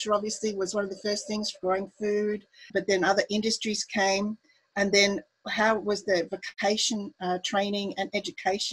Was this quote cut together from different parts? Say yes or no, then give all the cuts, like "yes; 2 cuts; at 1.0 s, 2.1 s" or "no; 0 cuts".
yes; 2 cuts; at 2.7 s, 6.4 s